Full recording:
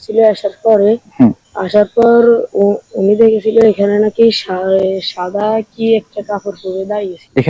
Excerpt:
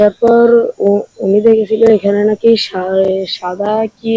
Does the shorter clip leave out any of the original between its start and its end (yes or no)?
no